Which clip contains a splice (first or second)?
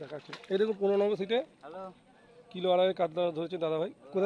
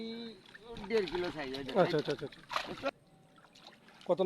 second